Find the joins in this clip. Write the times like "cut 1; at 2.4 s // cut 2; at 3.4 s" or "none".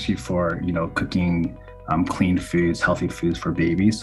none